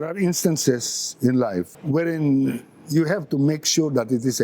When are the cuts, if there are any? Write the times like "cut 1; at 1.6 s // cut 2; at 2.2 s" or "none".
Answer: cut 1; at 1.8 s